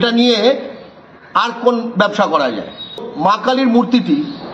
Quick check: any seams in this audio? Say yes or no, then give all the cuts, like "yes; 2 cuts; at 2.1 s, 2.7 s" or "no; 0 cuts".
yes; 1 cut; at 3.1 s